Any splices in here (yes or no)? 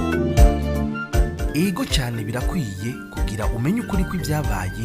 yes